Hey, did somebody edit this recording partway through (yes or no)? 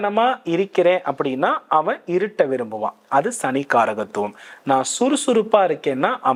no